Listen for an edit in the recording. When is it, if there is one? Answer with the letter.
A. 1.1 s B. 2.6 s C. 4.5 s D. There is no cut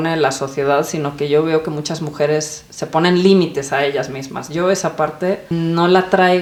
D